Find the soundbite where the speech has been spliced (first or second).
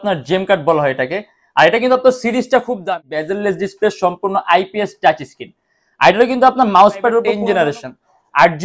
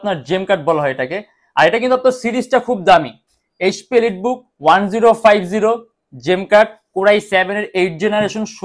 first